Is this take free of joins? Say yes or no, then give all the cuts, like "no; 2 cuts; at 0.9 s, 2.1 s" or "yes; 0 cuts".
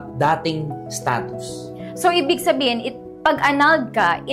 yes; 0 cuts